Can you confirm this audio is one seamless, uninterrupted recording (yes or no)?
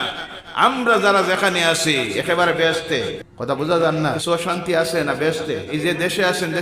no